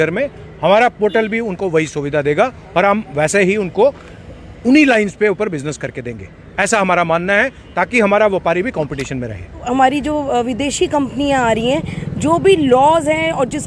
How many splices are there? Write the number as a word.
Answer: one